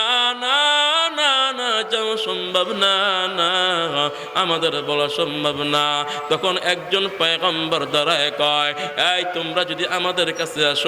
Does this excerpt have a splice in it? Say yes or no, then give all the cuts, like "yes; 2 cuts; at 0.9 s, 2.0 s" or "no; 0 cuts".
no; 0 cuts